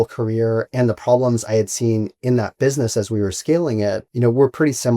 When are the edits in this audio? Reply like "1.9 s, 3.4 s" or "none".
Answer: 4.1 s